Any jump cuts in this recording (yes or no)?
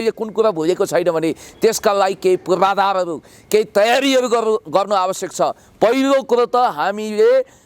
no